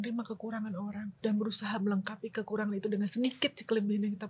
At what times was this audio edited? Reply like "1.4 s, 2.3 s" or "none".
1.1 s